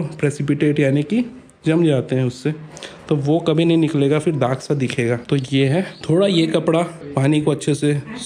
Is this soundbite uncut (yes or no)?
yes